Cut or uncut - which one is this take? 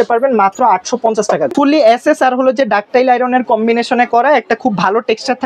cut